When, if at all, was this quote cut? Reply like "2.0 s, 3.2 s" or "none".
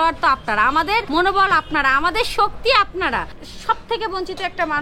1.1 s, 3.4 s